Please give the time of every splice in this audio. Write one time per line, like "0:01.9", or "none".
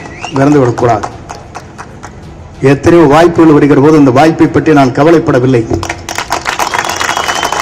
none